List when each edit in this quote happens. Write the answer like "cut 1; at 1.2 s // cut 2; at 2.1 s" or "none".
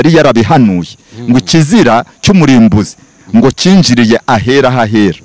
none